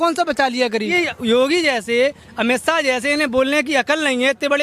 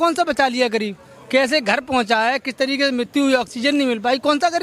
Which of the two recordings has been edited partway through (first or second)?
first